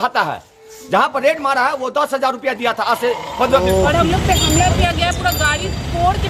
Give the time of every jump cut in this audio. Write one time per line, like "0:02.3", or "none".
0:03.6